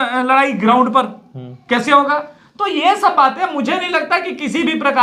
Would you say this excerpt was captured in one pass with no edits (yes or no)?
yes